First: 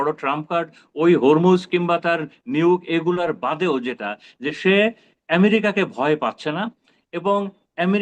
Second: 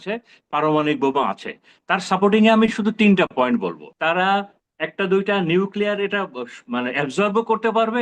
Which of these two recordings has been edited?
second; 2 cuts; at 3.8 s, 4.6 s

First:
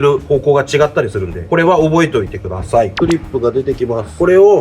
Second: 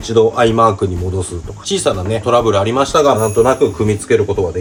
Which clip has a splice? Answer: first; 1 cut; at 2.9 s

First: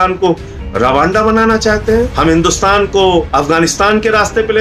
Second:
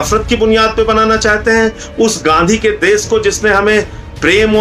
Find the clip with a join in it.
first; 2 cuts; at 2.1 s, 3.3 s

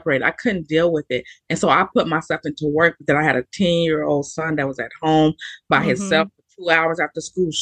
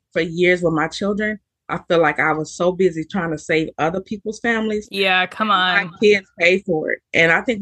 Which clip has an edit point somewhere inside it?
second; 1 cut; at 5.9 s

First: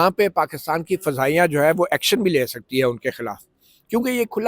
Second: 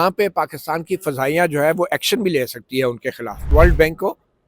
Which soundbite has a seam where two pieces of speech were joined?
second; 1 cut; at 3.5 s

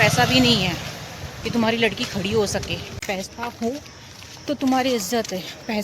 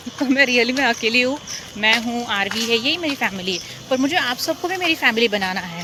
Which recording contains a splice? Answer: first; 1 cut; at 2.9 s

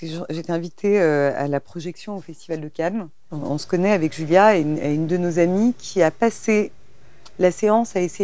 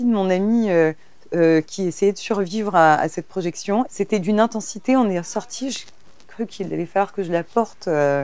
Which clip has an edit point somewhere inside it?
second; 1 cut; at 3.9 s

